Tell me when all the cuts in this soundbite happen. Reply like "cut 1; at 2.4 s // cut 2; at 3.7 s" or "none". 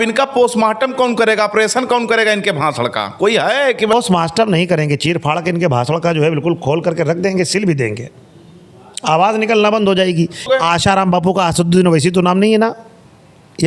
cut 1; at 3.9 s // cut 2; at 10.5 s